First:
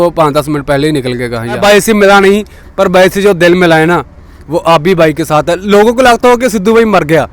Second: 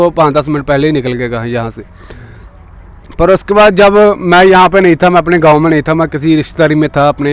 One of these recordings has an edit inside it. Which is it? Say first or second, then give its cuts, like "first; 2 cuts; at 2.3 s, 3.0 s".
first; 1 cut; at 1.6 s